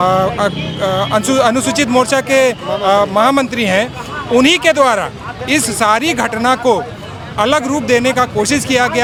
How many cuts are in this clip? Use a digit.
0